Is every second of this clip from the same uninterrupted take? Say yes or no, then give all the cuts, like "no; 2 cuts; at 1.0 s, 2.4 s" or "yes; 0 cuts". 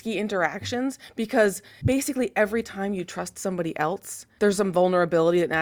no; 2 cuts; at 1.7 s, 4.2 s